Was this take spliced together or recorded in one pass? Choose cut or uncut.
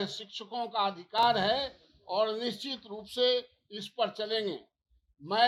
uncut